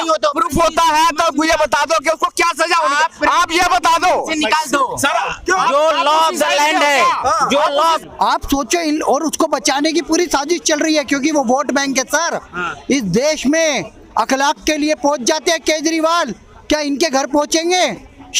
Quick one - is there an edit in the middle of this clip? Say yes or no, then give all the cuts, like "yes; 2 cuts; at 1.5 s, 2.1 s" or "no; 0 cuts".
yes; 1 cut; at 8.0 s